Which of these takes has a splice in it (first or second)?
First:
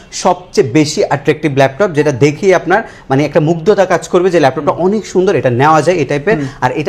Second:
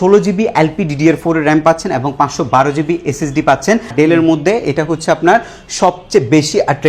second